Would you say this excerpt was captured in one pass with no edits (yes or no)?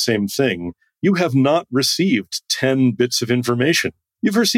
yes